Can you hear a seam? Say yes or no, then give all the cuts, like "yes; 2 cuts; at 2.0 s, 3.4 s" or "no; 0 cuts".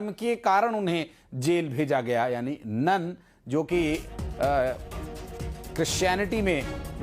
no; 0 cuts